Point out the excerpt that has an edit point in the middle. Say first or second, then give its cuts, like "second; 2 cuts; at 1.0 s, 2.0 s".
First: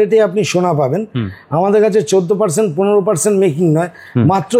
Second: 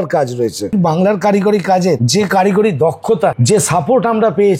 second; 3 cuts; at 0.7 s, 2.0 s, 3.4 s